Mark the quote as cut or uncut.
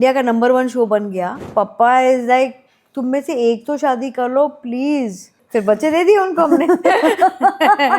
cut